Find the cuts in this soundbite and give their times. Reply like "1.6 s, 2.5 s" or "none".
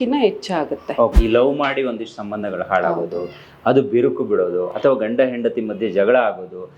1.1 s

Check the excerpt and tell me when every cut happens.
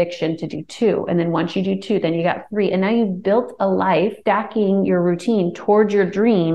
4.2 s

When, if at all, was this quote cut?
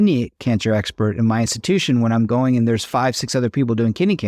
1.5 s

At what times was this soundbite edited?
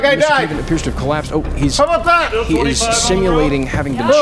none

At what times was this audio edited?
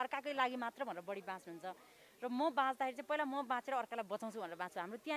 none

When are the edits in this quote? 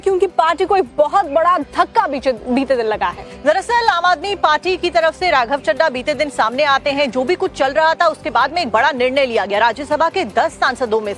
3.7 s

